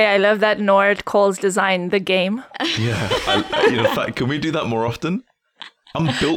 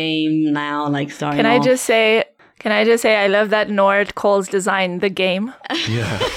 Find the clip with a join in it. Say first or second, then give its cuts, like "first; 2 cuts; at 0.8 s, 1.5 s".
second; 1 cut; at 1.4 s